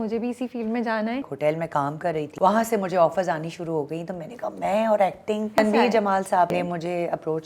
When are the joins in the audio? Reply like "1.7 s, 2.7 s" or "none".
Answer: 1.3 s, 2.3 s, 5.6 s, 6.5 s